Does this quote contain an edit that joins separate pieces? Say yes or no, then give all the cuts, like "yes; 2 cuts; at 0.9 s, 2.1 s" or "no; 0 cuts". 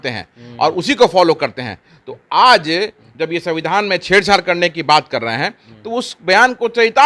no; 0 cuts